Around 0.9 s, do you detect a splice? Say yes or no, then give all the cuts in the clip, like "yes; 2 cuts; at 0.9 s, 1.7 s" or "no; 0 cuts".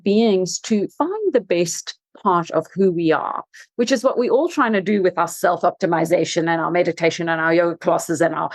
yes; 1 cut; at 0.9 s